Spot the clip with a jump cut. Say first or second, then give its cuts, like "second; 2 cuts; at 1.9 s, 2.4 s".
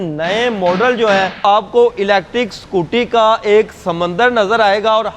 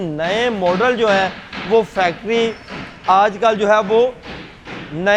first; 1 cut; at 1.4 s